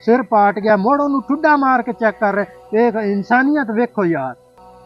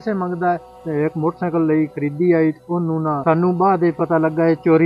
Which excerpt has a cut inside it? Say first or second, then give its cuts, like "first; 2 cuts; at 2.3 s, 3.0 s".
second; 2 cuts; at 0.8 s, 3.2 s